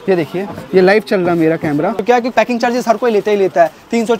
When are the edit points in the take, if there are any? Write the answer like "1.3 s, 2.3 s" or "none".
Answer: 2.0 s